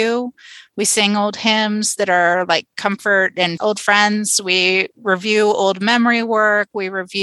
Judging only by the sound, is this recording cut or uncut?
cut